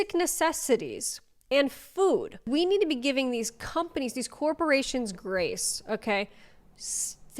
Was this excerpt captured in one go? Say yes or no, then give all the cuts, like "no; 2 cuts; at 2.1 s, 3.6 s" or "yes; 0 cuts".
no; 1 cut; at 2.4 s